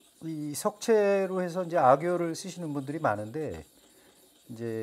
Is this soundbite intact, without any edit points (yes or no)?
yes